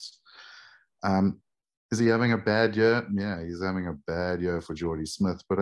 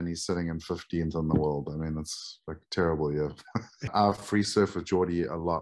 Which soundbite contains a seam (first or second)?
second